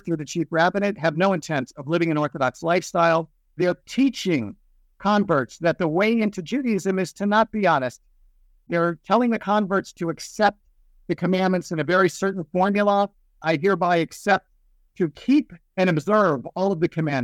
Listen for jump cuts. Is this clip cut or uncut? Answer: cut